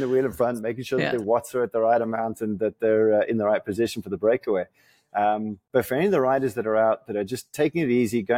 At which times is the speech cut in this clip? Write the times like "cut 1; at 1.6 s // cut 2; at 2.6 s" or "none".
none